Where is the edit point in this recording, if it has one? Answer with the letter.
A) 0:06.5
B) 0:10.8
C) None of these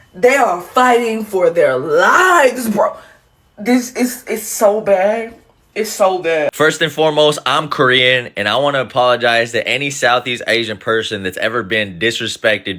A